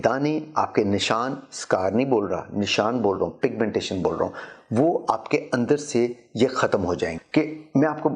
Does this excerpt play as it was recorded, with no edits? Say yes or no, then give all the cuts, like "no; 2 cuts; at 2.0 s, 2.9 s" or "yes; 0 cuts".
no; 1 cut; at 7.2 s